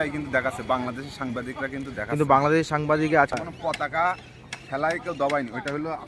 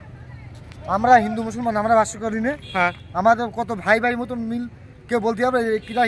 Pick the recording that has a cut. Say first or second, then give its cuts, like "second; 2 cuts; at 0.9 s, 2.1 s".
first; 1 cut; at 3.4 s